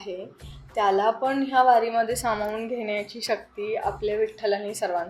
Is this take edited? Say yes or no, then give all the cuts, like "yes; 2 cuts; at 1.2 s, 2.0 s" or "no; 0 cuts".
no; 0 cuts